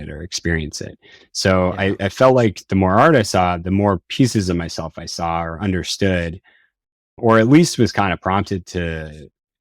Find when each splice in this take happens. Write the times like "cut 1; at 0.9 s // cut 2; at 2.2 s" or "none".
none

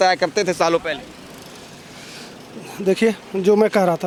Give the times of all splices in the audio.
none

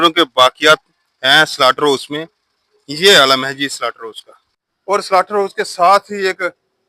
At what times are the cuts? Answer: cut 1; at 4.8 s

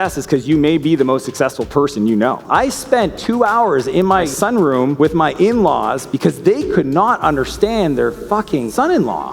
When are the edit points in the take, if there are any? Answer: cut 1; at 2.4 s // cut 2; at 4.3 s

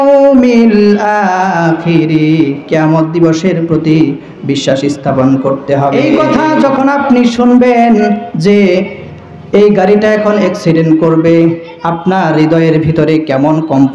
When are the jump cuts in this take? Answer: cut 1; at 6.0 s

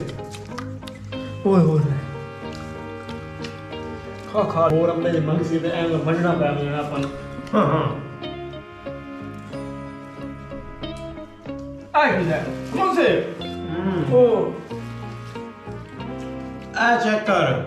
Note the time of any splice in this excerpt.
cut 1; at 15.6 s

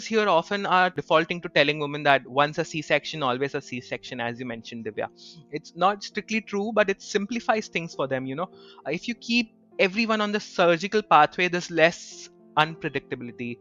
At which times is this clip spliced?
cut 1; at 0.9 s

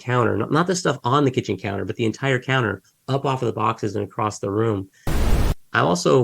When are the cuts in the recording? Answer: cut 1; at 5.1 s

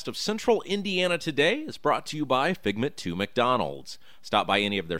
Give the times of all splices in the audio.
none

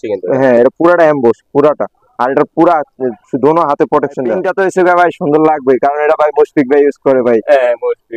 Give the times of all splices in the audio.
cut 1; at 4.4 s

